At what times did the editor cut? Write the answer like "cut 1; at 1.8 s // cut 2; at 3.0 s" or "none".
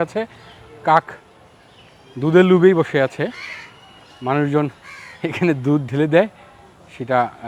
none

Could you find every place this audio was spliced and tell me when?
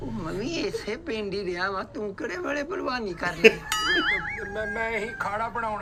none

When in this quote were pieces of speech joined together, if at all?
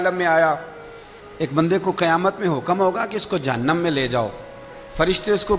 cut 1; at 1.2 s

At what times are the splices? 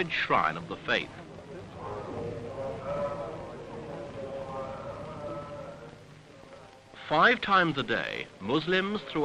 cut 1; at 2.2 s

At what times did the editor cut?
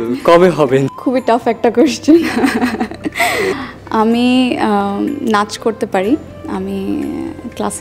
cut 1; at 1.0 s // cut 2; at 3.5 s

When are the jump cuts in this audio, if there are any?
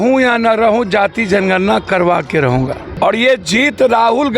cut 1; at 2.8 s

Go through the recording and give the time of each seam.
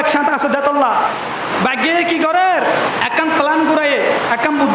cut 1; at 1.4 s // cut 2; at 2.9 s

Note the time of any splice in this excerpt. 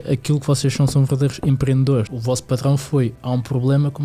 cut 1; at 2.1 s

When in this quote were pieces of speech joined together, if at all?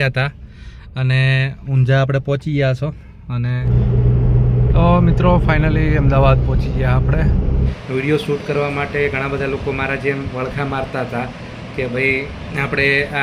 cut 1; at 3.5 s // cut 2; at 7.5 s

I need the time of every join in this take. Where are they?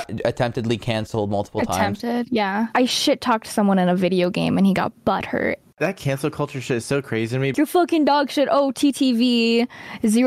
cut 1; at 2.7 s // cut 2; at 5.7 s // cut 3; at 7.5 s

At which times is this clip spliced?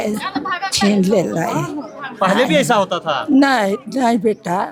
none

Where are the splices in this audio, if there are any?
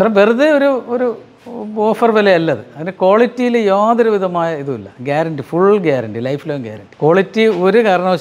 none

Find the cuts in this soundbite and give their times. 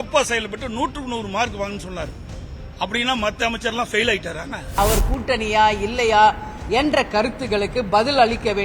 cut 1; at 4.8 s

